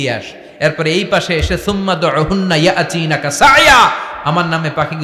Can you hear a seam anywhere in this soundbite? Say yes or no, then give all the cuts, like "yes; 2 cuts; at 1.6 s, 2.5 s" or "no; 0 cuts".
no; 0 cuts